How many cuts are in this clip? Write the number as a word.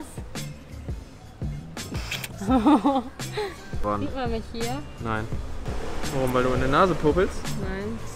one